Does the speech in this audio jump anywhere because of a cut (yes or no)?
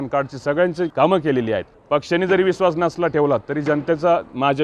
yes